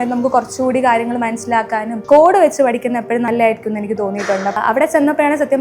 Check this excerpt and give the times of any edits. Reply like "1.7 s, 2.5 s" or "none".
1.9 s, 3.3 s, 4.6 s